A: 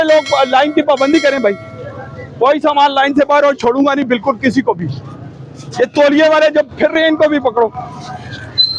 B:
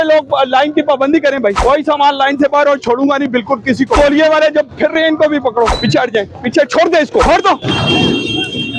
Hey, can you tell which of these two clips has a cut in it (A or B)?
B